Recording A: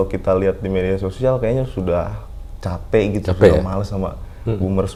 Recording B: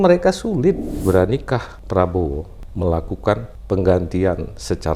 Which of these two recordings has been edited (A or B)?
B